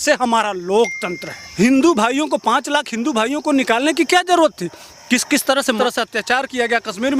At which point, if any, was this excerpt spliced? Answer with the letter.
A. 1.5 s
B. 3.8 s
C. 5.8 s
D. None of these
A